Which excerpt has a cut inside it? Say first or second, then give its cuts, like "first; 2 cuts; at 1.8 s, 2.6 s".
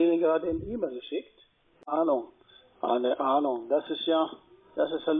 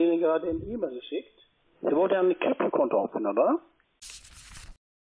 first; 1 cut; at 1.8 s